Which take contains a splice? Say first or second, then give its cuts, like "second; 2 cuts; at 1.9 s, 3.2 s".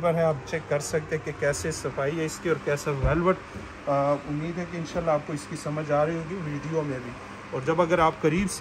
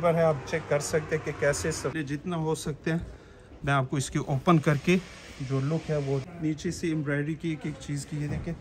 second; 2 cuts; at 1.9 s, 6.3 s